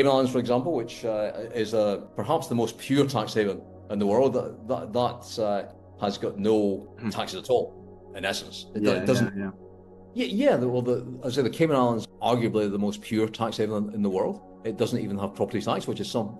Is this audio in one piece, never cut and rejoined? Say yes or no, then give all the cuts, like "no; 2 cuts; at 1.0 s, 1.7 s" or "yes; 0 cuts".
yes; 0 cuts